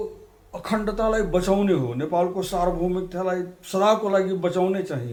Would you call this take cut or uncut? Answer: uncut